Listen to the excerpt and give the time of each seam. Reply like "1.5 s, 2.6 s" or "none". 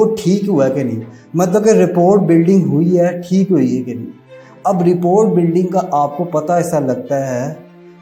none